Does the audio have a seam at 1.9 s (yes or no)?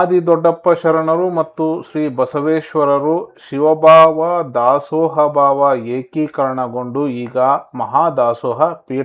no